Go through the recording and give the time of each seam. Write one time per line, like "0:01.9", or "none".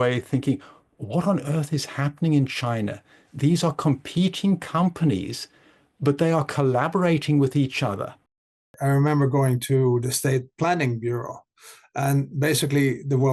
0:08.7
0:10.0